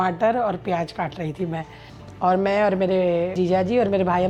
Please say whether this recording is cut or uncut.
cut